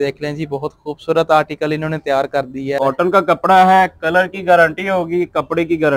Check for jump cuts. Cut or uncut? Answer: cut